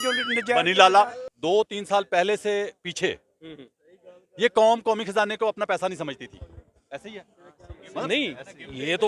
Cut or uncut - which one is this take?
cut